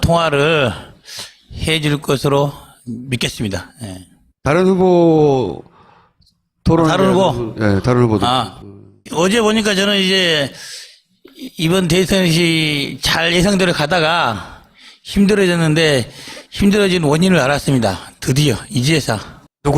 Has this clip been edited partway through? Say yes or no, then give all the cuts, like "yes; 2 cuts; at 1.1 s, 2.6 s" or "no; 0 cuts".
yes; 1 cut; at 16.6 s